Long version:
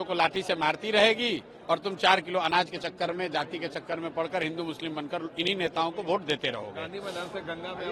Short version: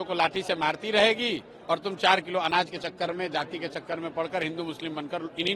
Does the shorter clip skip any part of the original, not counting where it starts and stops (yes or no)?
no